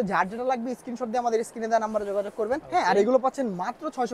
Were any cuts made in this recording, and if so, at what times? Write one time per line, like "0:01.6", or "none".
0:02.6